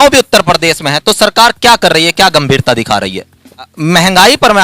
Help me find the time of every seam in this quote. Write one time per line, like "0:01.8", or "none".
0:03.7